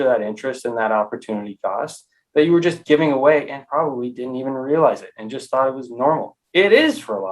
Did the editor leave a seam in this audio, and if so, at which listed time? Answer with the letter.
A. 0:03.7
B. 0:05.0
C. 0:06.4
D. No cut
C